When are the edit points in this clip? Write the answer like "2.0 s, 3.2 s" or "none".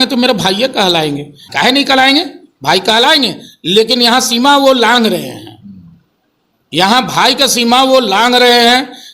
1.4 s